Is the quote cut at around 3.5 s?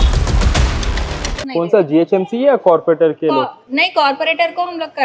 no; 1 cut; at 1.4 s

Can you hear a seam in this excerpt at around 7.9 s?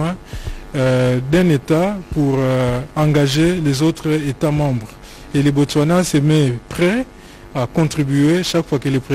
no; 1 cut; at 1.0 s

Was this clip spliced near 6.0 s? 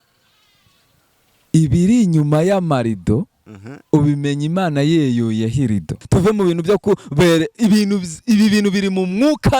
yes; 1 cut; at 6.0 s

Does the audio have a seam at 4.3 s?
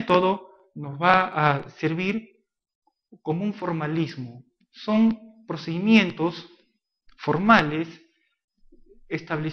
no; 1 cut; at 8.0 s

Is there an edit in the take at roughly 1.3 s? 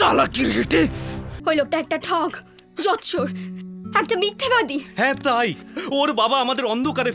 yes; 1 cut; at 1.3 s

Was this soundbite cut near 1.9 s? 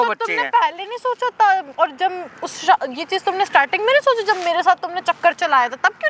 no; 0 cuts

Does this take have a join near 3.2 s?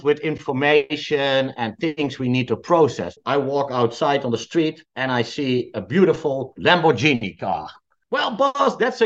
yes; 2 cuts; at 3.2 s, 8.0 s

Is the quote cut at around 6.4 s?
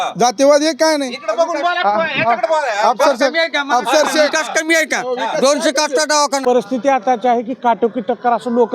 yes; 1 cut; at 6.4 s

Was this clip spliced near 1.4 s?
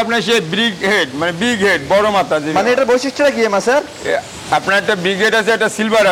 no; 0 cuts

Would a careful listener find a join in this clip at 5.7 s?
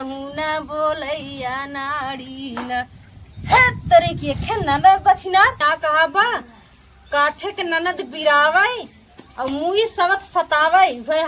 yes; 1 cut; at 5.7 s

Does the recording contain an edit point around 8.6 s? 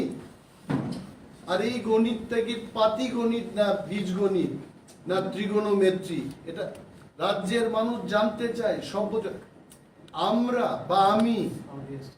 yes; 1 cut; at 8.6 s

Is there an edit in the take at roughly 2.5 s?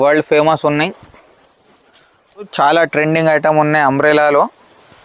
yes; 1 cut; at 2.5 s

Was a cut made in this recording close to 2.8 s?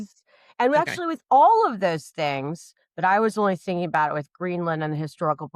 no; 0 cuts

